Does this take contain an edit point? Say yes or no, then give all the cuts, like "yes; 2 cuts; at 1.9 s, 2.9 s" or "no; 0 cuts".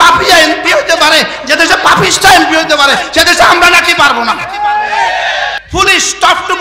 yes; 1 cut; at 5.6 s